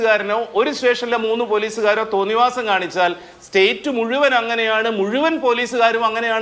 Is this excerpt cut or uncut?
uncut